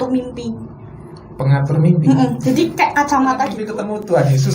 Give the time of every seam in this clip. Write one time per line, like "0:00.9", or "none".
0:03.6